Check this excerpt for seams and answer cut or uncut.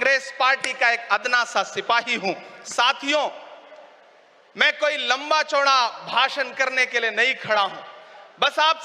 uncut